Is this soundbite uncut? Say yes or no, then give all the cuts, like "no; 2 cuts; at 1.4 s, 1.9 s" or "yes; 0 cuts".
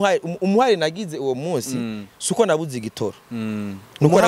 yes; 0 cuts